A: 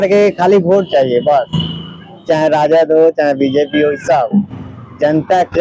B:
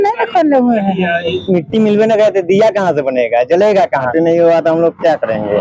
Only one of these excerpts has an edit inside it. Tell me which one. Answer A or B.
B